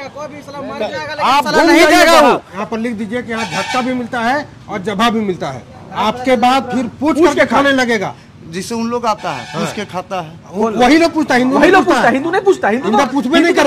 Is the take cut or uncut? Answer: cut